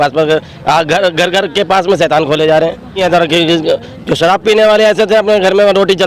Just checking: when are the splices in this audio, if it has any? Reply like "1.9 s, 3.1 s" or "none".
3.0 s